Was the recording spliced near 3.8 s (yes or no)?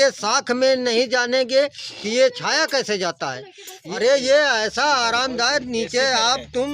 yes